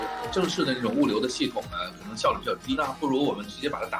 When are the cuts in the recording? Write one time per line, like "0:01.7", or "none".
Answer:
0:02.8